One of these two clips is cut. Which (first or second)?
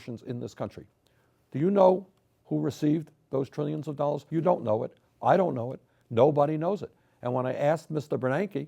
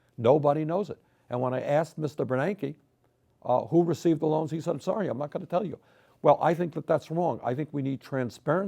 first